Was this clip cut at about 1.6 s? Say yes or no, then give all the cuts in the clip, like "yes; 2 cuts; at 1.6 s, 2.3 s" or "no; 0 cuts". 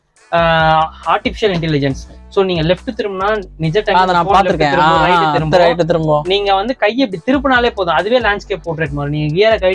no; 0 cuts